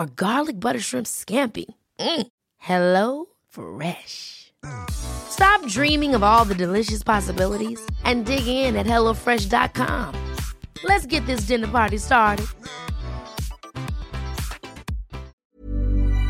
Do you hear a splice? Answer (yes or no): yes